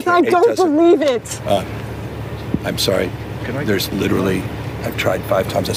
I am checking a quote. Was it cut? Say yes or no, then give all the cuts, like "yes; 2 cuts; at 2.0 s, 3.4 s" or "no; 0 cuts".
no; 0 cuts